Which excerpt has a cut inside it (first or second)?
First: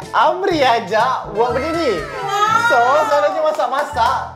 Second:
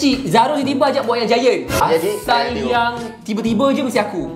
second